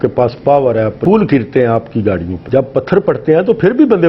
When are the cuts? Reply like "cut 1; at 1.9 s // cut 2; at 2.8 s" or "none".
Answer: cut 1; at 1.0 s